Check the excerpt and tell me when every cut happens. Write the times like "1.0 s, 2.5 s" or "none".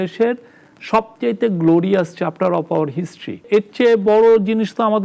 3.4 s